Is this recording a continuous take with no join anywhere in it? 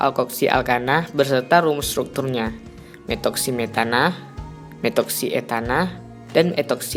yes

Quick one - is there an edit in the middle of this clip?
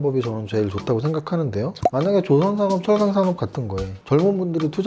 yes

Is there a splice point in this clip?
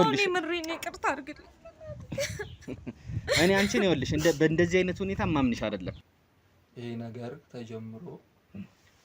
yes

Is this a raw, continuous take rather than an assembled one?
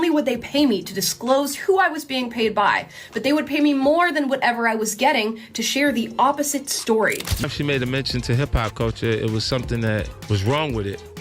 no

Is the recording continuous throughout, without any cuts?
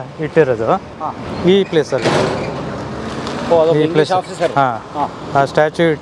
yes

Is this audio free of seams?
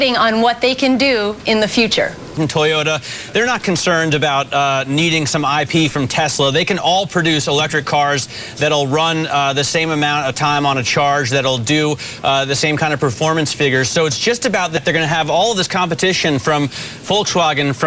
no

